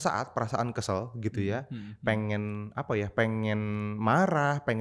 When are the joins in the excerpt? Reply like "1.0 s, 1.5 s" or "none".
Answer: none